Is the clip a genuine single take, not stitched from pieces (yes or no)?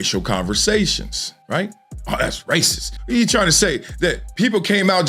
no